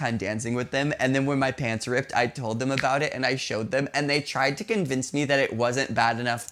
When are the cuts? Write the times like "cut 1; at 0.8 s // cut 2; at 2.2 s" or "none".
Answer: none